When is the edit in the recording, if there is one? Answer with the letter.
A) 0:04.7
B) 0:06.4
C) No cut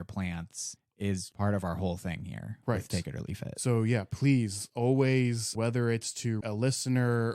B